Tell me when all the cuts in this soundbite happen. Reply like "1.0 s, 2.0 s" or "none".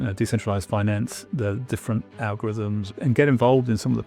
2.9 s